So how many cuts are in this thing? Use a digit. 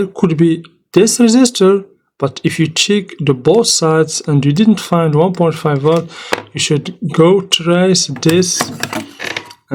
0